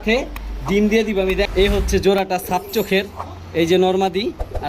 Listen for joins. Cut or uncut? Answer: cut